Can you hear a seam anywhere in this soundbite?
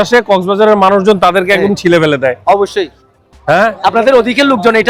no; 0 cuts

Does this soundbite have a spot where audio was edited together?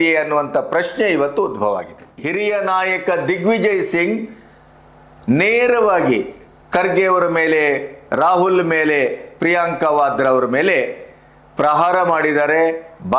yes; 1 cut; at 2.2 s

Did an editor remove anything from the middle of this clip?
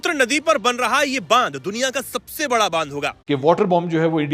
yes; 1 cut; at 3.2 s

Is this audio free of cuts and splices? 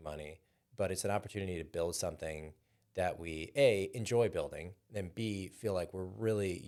yes; 0 cuts

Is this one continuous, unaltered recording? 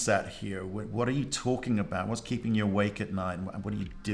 yes; 0 cuts

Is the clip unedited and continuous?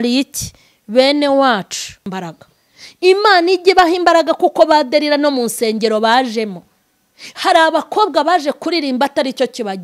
no; 1 cut; at 2.1 s

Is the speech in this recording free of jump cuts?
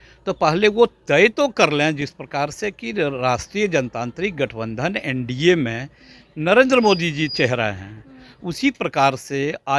yes; 0 cuts

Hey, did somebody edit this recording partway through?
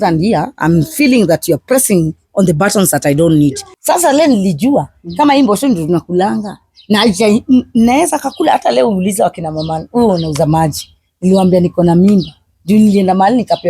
yes; 1 cut; at 3.7 s

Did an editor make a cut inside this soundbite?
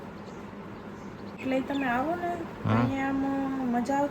yes; 1 cut; at 1.4 s

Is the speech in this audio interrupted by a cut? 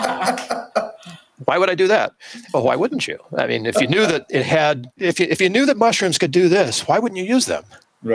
yes; 1 cut; at 5.0 s

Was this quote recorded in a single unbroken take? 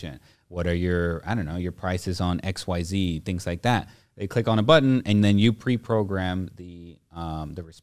yes; 0 cuts

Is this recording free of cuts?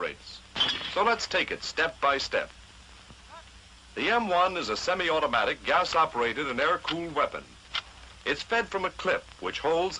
no; 1 cut; at 1.7 s

